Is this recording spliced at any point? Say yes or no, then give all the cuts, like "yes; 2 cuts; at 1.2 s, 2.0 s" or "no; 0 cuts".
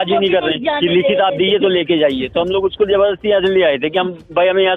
no; 0 cuts